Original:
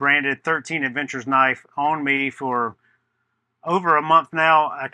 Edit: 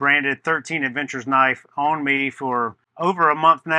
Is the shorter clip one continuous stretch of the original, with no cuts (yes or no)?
no